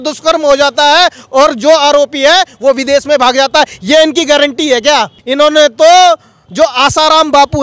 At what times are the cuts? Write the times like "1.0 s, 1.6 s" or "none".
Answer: 5.2 s